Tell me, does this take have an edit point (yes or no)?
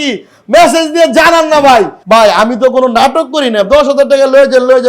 yes